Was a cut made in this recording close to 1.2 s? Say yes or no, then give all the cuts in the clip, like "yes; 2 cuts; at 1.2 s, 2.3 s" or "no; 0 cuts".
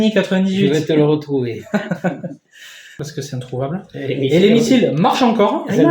no; 1 cut; at 3.1 s